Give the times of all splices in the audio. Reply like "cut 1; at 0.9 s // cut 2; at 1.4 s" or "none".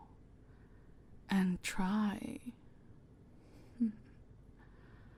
none